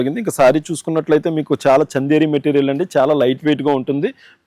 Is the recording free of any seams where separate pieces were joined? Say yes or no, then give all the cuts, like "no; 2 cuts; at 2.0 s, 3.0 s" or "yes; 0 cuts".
yes; 0 cuts